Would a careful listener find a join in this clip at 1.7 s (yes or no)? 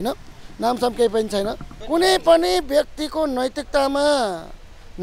yes